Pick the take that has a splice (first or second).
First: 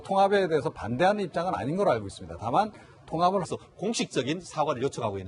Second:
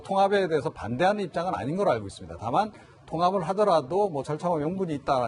second